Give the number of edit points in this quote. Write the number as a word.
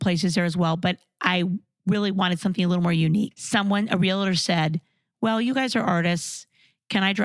one